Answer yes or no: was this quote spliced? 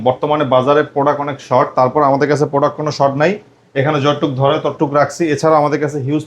no